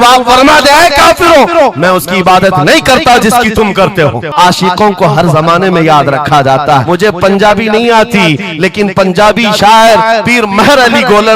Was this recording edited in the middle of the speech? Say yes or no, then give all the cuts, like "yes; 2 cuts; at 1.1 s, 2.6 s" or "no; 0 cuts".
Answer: yes; 2 cuts; at 4.3 s, 6.8 s